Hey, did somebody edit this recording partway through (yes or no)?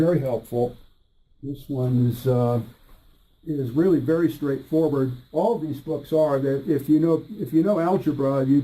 yes